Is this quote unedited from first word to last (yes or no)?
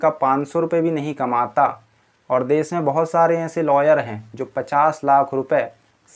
yes